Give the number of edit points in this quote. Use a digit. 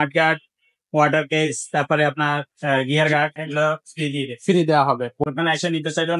1